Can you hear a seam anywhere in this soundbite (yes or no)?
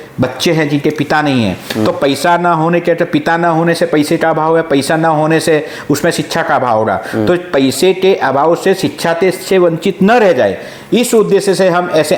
no